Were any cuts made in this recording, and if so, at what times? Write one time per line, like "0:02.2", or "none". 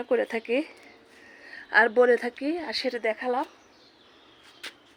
none

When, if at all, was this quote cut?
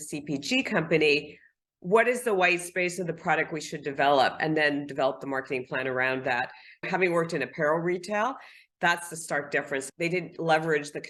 none

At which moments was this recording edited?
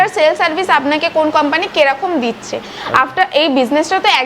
none

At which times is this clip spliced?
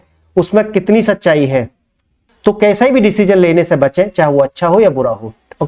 0:02.3

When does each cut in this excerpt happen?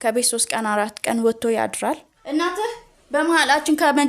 0:02.1

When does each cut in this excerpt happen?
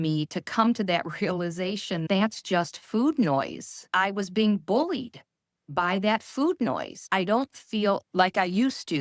0:02.0
0:03.9
0:07.1
0:08.0

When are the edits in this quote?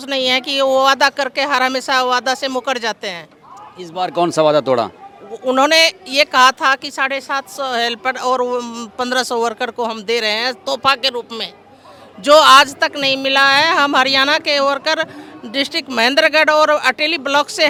none

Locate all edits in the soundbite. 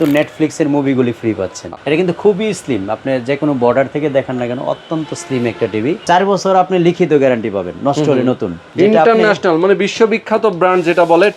0:01.6
0:06.0
0:08.6

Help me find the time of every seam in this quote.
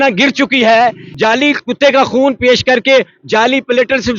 0:01.1

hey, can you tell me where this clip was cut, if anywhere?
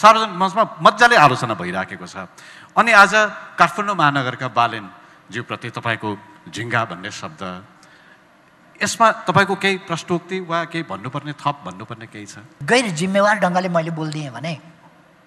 0:12.5

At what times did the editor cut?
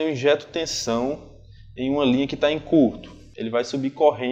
none

